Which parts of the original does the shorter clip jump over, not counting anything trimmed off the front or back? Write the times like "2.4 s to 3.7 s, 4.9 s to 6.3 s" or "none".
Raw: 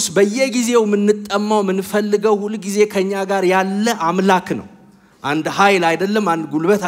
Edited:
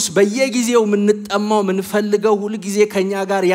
none

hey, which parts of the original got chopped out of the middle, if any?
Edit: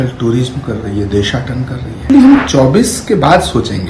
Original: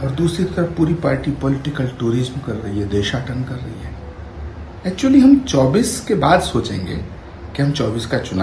3.9 s to 5.1 s

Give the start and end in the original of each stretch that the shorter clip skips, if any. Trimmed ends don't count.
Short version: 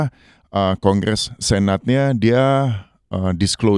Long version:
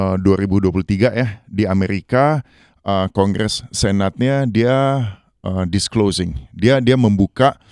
none

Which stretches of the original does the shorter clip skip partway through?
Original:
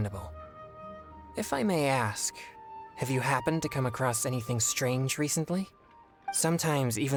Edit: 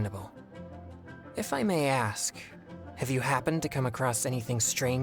none

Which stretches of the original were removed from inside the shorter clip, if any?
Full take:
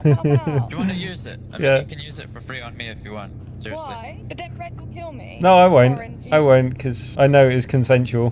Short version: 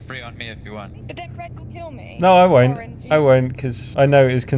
3.4 s to 4.2 s

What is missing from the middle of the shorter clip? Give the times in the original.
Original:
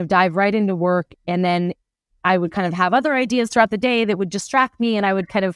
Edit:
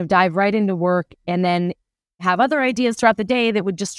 2.2 s to 2.7 s

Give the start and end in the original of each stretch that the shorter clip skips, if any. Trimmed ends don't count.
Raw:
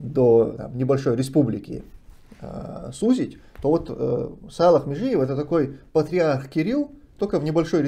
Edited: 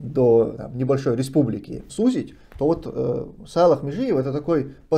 1.8 s to 2.8 s

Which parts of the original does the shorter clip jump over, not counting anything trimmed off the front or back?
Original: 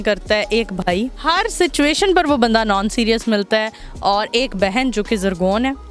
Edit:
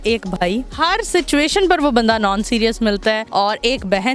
3.7 s to 3.9 s

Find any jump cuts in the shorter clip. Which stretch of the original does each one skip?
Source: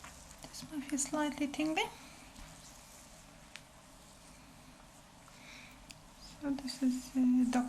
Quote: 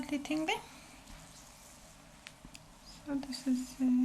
3.7 s to 5.8 s

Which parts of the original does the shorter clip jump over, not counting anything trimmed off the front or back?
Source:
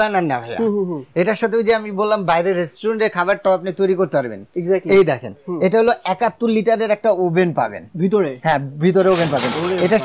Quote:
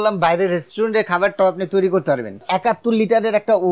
4.5 s to 6.0 s

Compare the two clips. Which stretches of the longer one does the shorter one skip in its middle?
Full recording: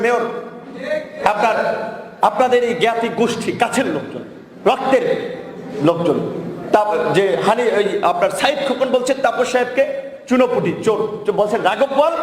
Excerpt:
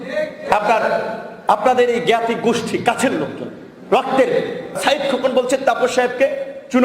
5.5 s to 8.3 s

